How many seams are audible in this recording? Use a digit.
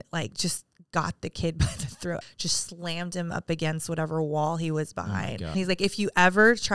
2